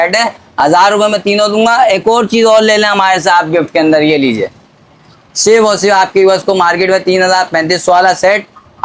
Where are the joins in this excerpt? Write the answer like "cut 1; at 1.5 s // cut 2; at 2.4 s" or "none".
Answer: none